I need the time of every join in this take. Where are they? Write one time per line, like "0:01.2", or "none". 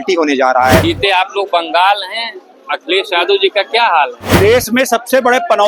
0:00.8
0:04.2

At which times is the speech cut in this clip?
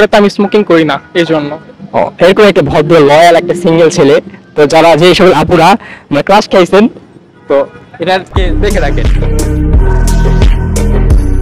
0:08.8

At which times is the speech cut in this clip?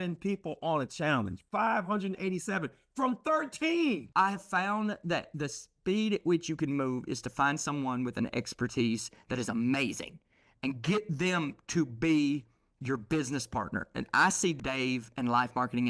0:04.1

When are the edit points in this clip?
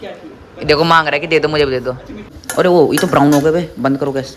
0:02.4

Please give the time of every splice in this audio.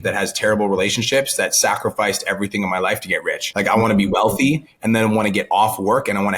0:03.4

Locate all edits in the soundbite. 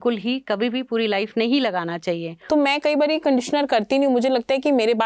0:02.3

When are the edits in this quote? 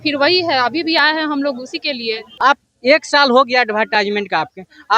0:02.3

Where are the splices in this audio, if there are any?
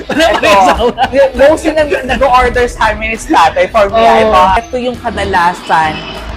0:04.6

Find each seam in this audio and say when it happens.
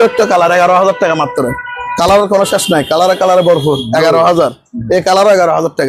none

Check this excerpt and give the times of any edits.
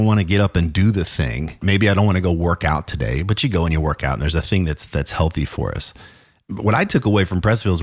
0:01.6
0:06.4

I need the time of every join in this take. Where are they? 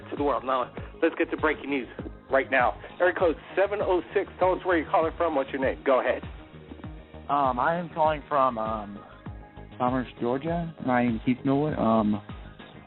none

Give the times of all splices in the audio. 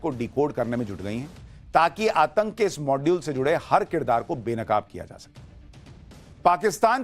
0:04.2

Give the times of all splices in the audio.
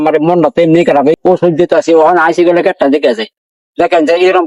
0:01.2

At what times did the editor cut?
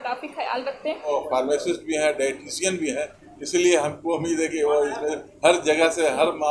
0:01.1

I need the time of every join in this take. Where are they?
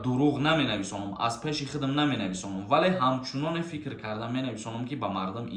none

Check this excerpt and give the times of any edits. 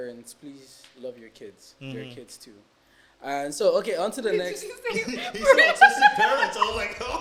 none

